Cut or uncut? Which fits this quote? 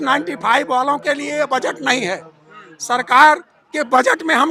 uncut